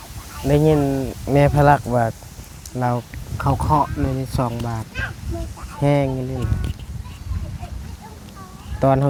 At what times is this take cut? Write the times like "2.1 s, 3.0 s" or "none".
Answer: none